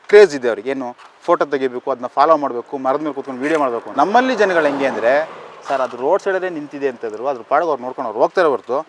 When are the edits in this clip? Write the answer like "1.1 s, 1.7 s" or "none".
none